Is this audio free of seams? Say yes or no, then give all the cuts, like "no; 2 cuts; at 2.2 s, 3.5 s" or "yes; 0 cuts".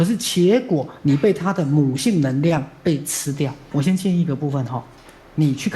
no; 1 cut; at 3.7 s